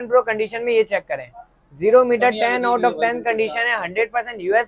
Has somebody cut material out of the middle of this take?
no; 0 cuts

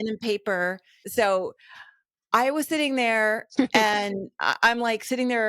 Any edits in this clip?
yes; 1 cut; at 1.0 s

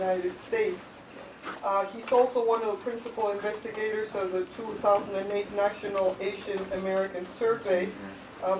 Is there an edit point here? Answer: yes; 1 cut; at 5.3 s

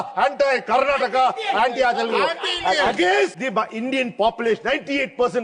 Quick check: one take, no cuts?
no; 1 cut; at 3.4 s

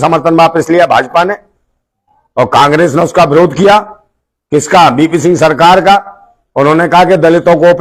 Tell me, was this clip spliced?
no; 0 cuts

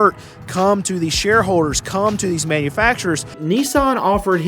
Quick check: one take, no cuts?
no; 1 cut; at 3.4 s

